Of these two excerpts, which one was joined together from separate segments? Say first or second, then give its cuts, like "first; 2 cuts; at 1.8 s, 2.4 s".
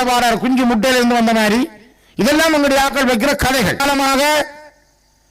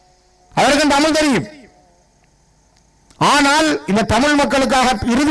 first; 1 cut; at 3.8 s